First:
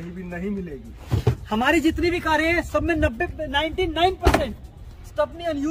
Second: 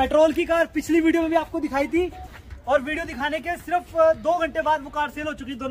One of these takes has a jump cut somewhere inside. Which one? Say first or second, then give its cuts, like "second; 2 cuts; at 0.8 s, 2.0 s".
first; 1 cut; at 0.9 s